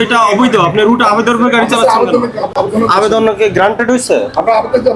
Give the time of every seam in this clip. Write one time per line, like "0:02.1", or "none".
none